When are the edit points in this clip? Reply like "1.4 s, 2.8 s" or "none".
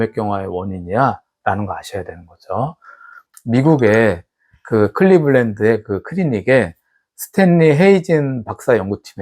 3.2 s